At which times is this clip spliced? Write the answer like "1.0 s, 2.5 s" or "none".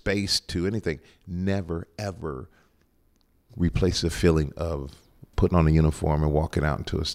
none